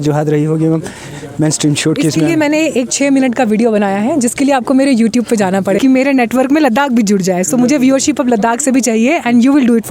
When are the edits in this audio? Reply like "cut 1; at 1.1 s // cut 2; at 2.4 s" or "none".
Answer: cut 1; at 5.8 s